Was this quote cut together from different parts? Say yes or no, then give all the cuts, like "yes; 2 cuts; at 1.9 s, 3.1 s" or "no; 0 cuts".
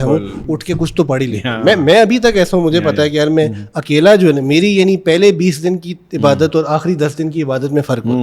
no; 0 cuts